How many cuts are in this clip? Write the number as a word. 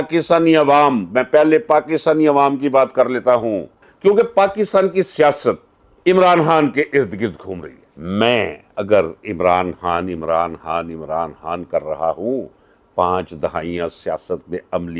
two